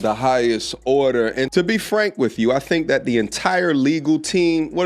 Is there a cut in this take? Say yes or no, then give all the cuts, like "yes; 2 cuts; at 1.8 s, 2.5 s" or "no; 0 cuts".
no; 0 cuts